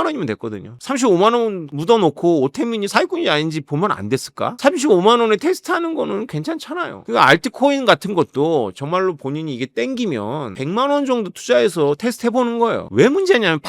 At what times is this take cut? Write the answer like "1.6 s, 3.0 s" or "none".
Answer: 0.8 s, 7.0 s, 10.5 s